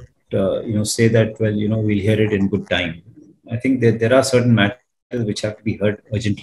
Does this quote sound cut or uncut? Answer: uncut